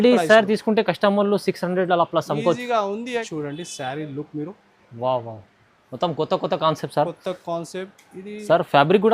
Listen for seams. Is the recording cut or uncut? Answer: cut